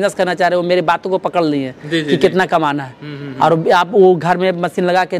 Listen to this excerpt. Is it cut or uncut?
uncut